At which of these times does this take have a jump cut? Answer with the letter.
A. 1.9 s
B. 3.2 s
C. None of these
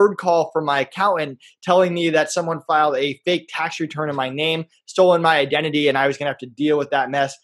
C